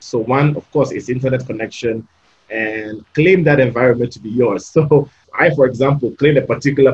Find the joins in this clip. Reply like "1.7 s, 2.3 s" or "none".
3.0 s, 5.2 s